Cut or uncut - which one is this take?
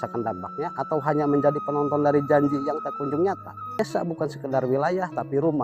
cut